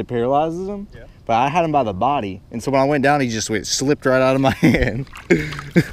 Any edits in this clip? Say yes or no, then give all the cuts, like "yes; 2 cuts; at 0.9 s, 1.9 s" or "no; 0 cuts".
no; 0 cuts